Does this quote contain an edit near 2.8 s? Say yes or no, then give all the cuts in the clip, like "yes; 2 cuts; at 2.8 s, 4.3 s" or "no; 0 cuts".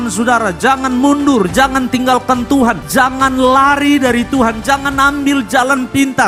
no; 0 cuts